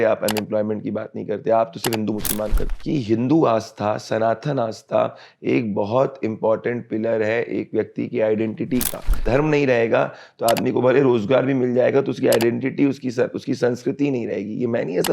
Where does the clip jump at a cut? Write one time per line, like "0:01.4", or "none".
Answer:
0:02.7
0:09.2